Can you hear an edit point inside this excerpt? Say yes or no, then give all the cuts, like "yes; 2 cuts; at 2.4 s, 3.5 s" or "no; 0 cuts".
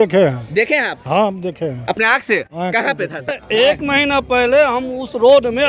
yes; 1 cut; at 3.3 s